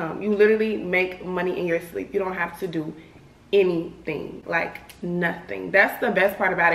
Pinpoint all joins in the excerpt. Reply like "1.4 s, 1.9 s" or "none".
none

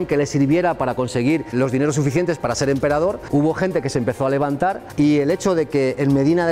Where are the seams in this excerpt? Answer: none

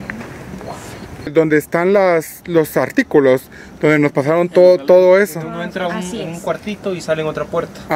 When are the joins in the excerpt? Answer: 1.3 s

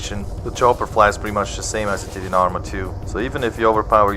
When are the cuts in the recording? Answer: none

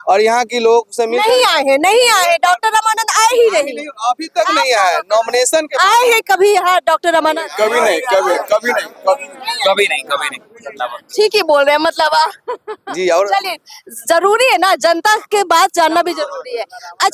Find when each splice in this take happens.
none

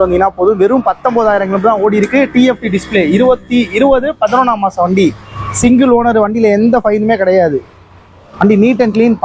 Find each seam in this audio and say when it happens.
none

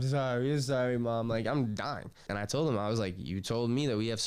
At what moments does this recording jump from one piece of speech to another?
2.3 s

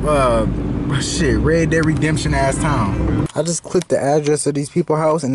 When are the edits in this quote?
3.3 s

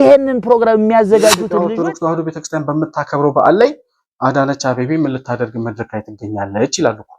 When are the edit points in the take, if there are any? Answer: 1.5 s

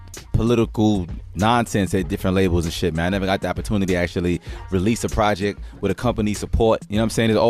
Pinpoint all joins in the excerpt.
4.7 s

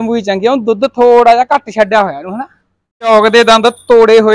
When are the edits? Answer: 3.1 s

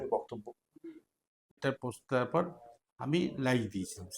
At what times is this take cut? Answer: 1.6 s

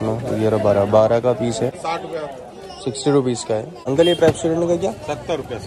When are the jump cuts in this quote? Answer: 1.8 s, 3.8 s

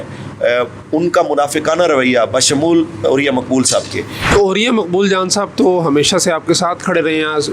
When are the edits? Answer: 4.3 s

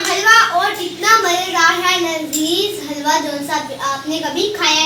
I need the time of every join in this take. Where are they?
none

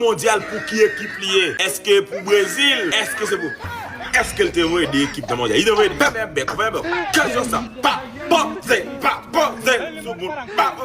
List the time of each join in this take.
1.5 s, 6.1 s

